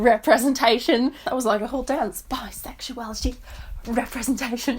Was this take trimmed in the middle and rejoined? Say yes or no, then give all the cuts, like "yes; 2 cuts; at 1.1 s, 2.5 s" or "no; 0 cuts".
yes; 1 cut; at 1.2 s